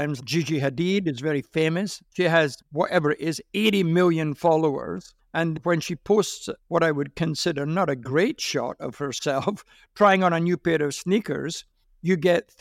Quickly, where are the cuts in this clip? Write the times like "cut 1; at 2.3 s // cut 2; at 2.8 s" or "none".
cut 1; at 2.3 s